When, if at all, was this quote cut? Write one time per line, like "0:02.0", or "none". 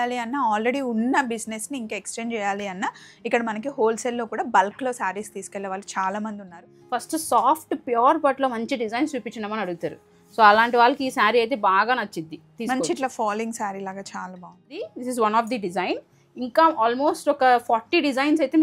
0:06.7
0:14.8